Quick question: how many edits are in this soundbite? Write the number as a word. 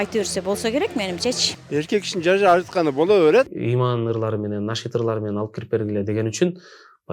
two